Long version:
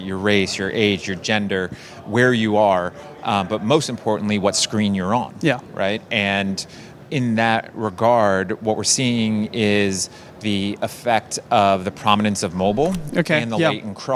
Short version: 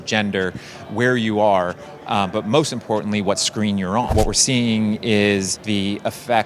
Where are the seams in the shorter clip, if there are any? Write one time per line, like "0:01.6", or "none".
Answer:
0:04.1
0:05.6